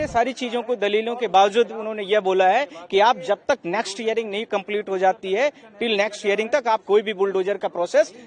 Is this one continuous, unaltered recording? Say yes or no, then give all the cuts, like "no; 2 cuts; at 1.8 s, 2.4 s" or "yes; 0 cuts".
yes; 0 cuts